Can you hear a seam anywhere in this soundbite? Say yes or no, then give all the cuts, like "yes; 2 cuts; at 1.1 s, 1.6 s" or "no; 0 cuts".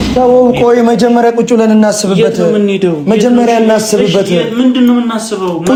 no; 0 cuts